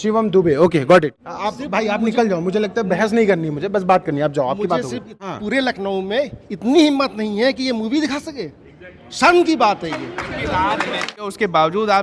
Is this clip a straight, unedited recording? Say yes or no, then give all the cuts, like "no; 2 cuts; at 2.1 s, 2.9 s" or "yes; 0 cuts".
no; 3 cuts; at 1.2 s, 5.1 s, 11.2 s